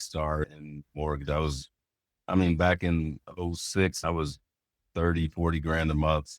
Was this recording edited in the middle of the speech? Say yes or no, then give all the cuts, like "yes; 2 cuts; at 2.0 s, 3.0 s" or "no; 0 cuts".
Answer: yes; 1 cut; at 4.0 s